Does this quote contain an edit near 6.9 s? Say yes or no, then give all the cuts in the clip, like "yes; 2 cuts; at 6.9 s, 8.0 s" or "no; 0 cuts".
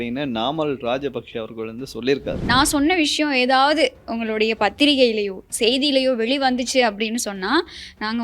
no; 1 cut; at 2.5 s